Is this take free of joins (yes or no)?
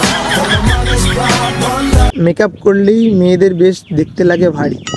no